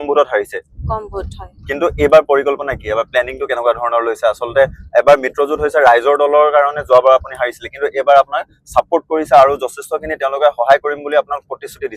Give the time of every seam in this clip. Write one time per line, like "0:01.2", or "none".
none

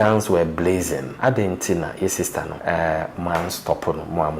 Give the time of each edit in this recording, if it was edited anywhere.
0:01.1
0:02.5

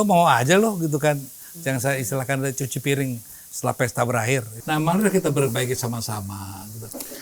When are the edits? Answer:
0:04.5

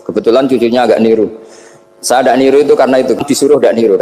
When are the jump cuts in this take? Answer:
0:03.0

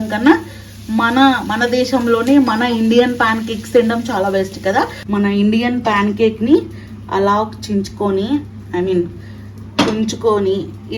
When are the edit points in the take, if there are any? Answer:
0:05.0

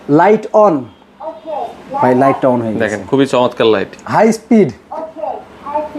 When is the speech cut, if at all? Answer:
0:04.8

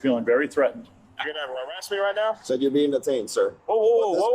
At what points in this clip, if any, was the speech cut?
0:00.8
0:02.4

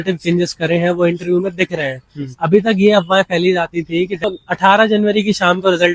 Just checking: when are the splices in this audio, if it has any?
0:04.2

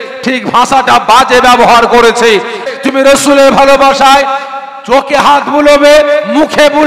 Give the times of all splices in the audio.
0:02.6

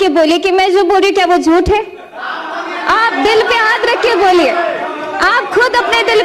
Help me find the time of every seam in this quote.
none

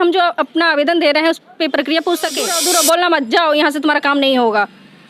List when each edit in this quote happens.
0:02.6

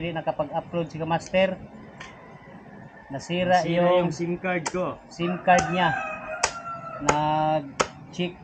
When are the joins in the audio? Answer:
none

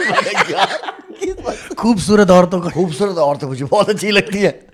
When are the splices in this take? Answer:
none

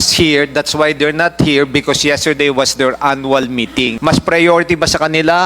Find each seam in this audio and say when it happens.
0:04.0

